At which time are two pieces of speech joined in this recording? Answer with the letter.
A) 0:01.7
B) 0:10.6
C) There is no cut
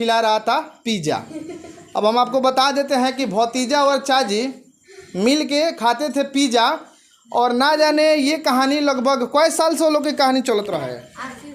C